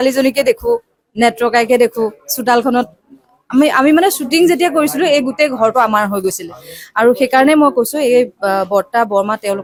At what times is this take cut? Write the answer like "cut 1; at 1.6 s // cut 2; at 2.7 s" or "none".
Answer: none